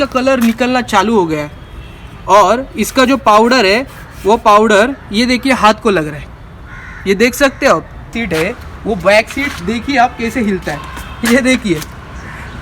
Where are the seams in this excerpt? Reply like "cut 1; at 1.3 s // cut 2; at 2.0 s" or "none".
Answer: cut 1; at 8.2 s

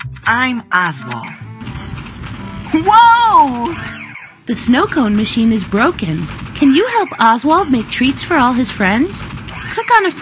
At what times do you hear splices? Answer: none

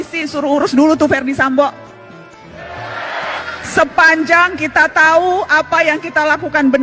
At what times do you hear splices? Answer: cut 1; at 3.4 s

